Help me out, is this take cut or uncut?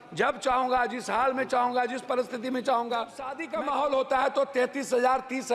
cut